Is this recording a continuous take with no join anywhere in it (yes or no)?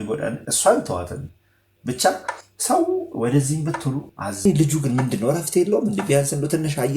no